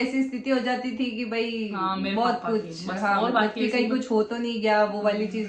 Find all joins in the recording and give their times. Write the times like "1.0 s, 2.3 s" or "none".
none